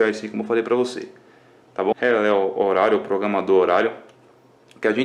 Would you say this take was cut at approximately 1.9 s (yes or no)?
yes